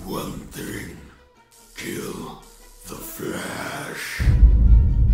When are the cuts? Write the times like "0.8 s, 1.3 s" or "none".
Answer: 4.2 s